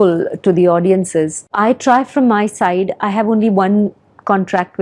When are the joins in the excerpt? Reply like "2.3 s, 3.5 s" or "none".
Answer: 1.5 s